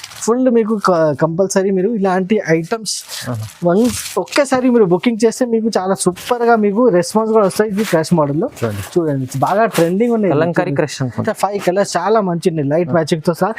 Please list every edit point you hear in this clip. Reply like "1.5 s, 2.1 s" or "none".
11.2 s

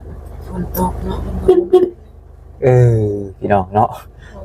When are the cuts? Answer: none

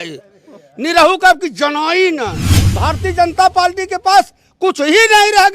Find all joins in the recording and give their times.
2.6 s

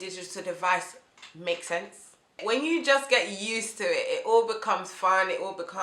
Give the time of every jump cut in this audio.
2.2 s

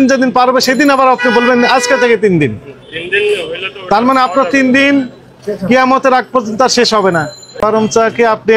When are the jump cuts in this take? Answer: 7.4 s

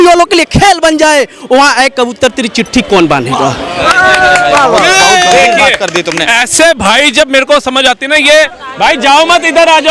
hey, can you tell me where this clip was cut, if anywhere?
none

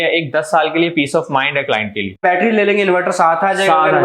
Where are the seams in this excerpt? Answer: 2.2 s

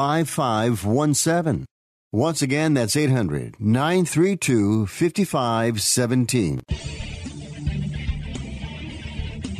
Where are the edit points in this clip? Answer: 6.6 s

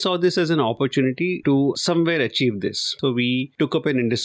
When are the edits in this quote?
1.6 s, 2.9 s

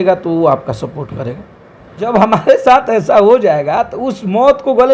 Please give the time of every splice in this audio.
2.1 s

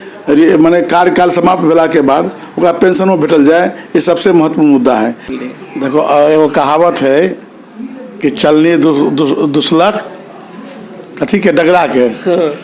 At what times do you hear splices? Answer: 5.3 s

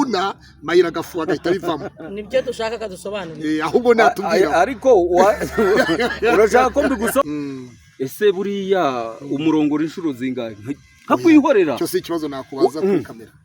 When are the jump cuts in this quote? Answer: 7.2 s

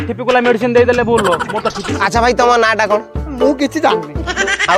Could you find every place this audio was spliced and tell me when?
1.9 s

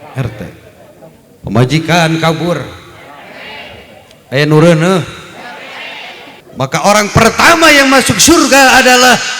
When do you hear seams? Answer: 6.4 s

